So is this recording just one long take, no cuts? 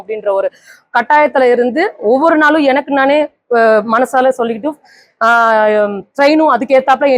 yes; 0 cuts

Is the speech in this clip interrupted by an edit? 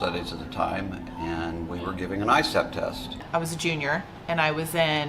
yes; 1 cut; at 3.1 s

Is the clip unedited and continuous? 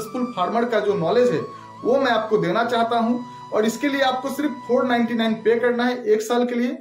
yes; 0 cuts

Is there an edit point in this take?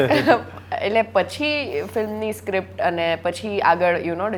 no; 0 cuts

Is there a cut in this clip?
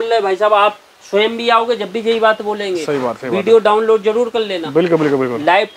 no; 0 cuts

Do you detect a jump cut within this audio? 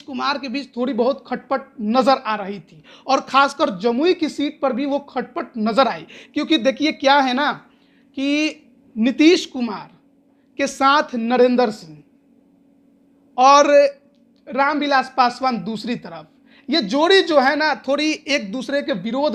no; 0 cuts

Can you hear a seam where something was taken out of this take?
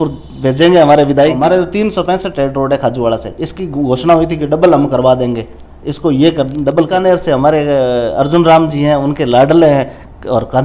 yes; 2 cuts; at 1.4 s, 6.9 s

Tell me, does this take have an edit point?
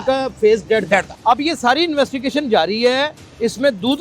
yes; 1 cut; at 1.1 s

